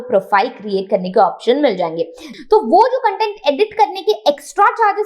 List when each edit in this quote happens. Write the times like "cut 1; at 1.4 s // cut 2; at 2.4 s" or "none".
cut 1; at 2.2 s

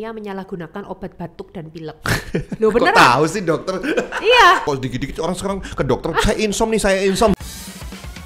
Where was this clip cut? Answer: cut 1; at 4.6 s // cut 2; at 7.3 s

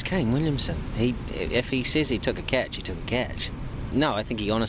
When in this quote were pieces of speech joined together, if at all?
none

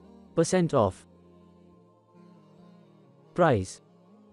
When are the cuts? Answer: cut 1; at 0.9 s // cut 2; at 3.3 s

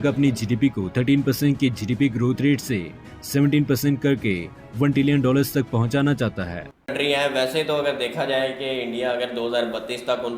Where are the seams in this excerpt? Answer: cut 1; at 6.9 s

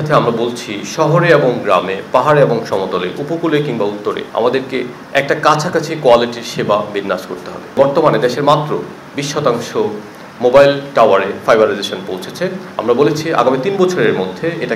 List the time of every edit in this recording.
cut 1; at 4.2 s // cut 2; at 7.7 s

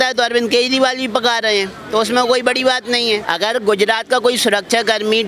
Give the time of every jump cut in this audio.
cut 1; at 3.3 s

